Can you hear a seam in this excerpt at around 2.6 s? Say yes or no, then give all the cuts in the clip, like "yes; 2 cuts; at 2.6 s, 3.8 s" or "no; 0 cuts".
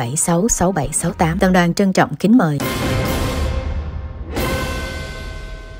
yes; 1 cut; at 2.6 s